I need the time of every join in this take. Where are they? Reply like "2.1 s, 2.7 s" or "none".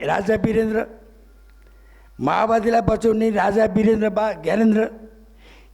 none